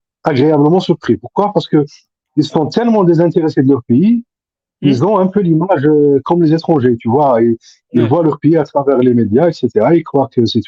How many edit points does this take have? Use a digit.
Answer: 0